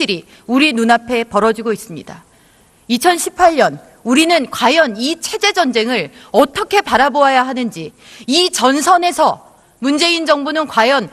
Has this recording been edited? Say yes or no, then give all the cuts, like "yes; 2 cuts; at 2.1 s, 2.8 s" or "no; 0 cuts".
yes; 1 cut; at 3.9 s